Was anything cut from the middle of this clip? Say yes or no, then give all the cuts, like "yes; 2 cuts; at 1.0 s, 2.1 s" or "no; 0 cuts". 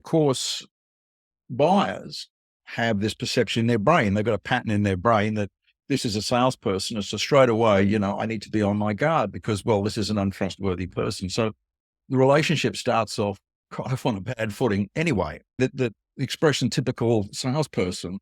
yes; 1 cut; at 15.6 s